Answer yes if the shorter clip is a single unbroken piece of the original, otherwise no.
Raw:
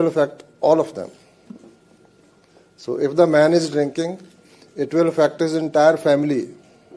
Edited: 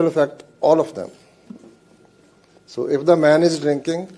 no